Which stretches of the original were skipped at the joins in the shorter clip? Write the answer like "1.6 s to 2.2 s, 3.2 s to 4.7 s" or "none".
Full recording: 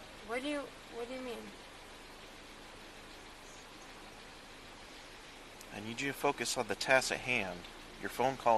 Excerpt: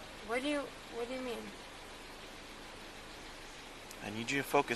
3.3 s to 5.0 s